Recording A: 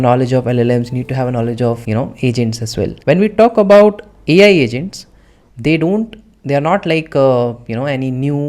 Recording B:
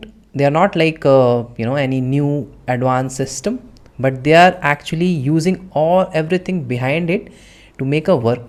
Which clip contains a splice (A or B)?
A